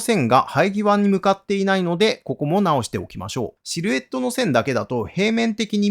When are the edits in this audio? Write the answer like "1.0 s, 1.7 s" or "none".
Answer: 3.6 s